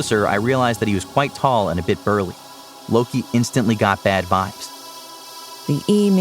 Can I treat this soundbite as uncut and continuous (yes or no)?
no